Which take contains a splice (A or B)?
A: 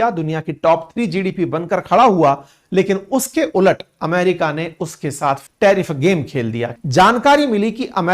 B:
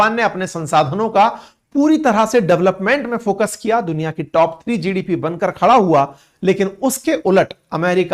A